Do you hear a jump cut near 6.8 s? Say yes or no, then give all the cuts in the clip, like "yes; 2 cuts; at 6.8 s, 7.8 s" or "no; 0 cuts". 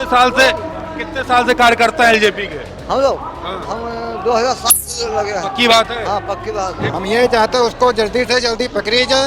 yes; 1 cut; at 6.8 s